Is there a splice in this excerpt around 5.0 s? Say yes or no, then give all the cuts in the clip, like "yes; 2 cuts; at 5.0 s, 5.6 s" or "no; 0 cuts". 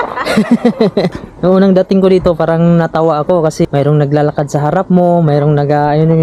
no; 2 cuts; at 1.1 s, 3.7 s